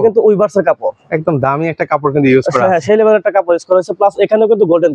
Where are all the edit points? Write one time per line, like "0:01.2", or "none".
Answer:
none